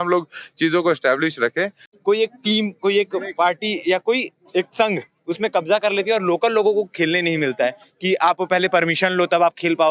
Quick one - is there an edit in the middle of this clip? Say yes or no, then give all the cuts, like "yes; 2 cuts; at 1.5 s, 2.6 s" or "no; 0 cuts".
yes; 1 cut; at 1.8 s